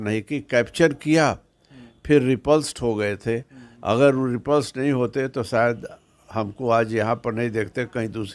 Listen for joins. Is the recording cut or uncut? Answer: uncut